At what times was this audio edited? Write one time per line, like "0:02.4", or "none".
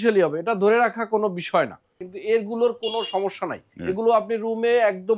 0:02.0
0:03.7